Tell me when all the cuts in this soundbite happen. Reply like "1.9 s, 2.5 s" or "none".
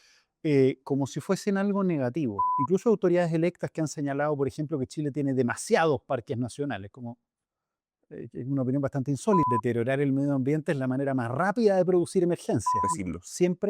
2.5 s, 9.5 s, 12.8 s